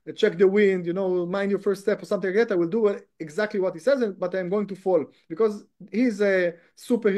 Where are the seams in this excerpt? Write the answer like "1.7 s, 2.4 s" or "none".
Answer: none